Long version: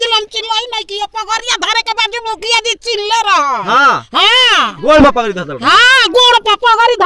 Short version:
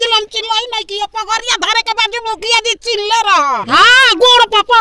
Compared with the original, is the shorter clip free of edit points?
no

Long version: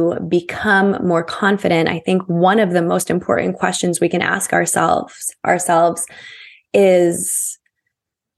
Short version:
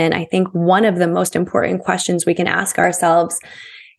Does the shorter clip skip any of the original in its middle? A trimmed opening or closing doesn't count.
yes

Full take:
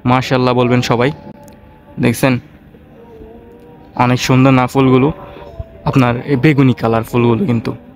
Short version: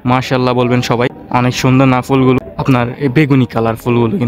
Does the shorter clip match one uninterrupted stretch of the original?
no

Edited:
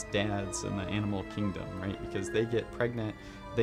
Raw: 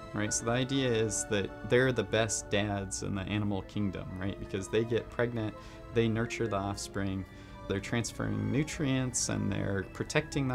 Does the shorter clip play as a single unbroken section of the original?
yes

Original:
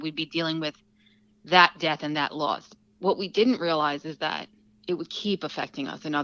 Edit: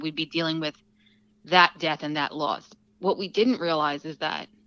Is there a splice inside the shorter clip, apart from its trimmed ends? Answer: no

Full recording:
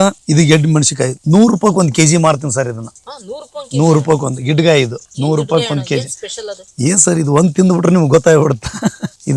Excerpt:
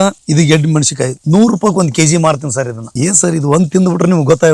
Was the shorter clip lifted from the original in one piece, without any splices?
no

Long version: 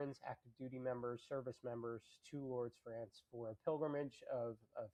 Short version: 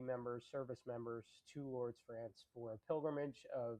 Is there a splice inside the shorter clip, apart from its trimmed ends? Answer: no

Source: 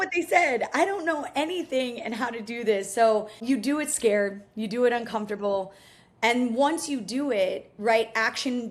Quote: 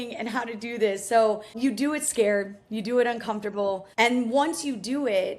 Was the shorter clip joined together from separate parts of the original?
yes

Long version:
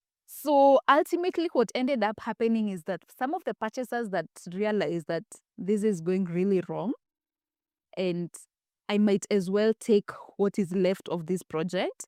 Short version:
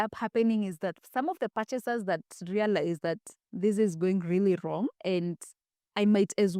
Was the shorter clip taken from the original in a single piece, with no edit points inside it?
no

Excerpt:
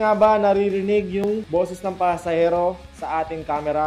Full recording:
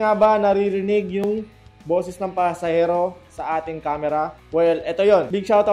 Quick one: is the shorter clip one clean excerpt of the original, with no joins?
no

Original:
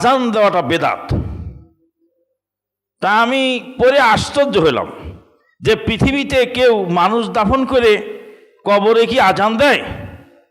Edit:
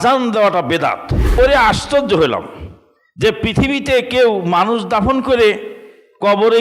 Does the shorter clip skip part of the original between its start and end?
yes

